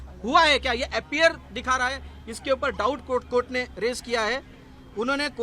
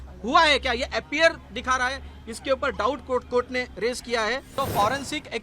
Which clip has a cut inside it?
second; 1 cut; at 4.5 s

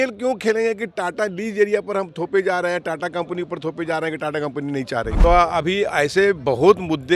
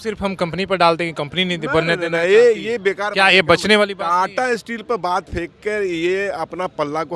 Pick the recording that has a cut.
first; 1 cut; at 5.2 s

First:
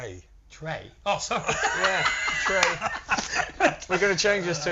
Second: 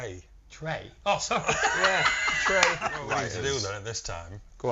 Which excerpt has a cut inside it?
second; 1 cut; at 3.1 s

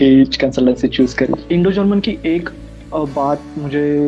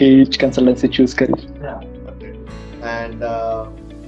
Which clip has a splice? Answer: first; 1 cut; at 1.4 s

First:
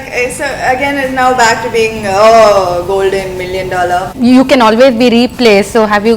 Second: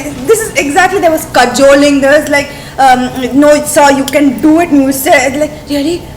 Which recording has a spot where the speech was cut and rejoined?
first; 1 cut; at 4.1 s

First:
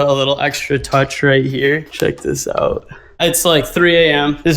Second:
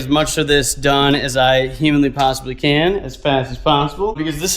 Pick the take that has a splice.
first; 1 cut; at 3.2 s

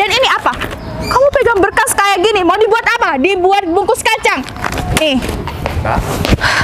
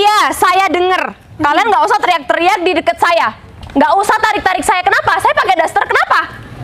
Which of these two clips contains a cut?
first; 1 cut; at 5.4 s

